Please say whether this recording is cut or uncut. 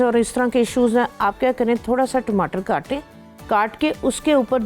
uncut